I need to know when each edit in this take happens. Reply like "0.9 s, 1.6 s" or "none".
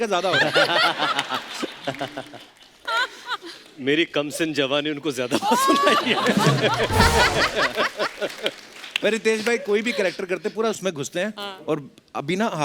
none